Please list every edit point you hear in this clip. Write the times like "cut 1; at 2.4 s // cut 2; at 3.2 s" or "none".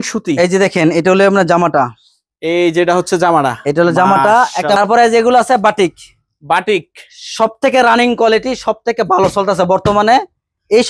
cut 1; at 4.8 s